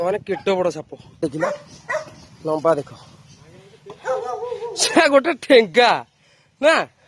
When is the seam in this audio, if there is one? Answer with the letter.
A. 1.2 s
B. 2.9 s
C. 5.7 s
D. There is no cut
A